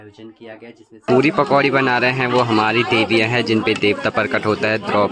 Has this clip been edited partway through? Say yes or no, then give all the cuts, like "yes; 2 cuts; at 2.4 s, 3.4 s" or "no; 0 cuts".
yes; 1 cut; at 1.0 s